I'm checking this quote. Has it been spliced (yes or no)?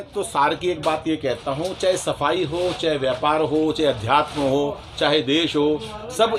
no